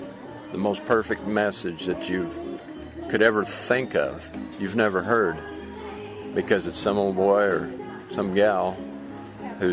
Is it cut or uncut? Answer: uncut